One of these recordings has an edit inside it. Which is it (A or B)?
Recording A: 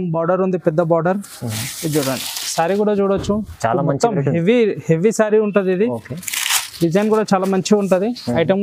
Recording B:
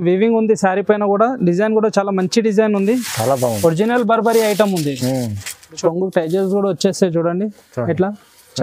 B